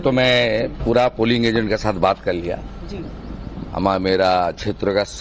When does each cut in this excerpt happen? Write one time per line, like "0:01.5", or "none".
none